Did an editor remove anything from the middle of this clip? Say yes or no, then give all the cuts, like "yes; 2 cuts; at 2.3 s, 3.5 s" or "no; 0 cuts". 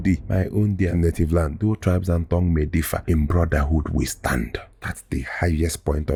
no; 0 cuts